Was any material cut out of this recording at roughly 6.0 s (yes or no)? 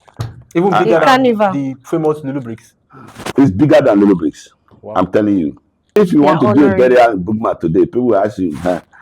yes